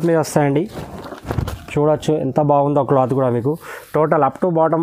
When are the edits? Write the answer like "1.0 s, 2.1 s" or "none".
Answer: none